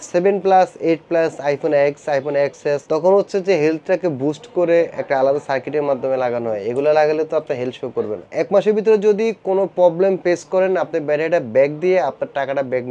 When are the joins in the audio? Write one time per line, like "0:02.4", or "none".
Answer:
0:02.8
0:08.2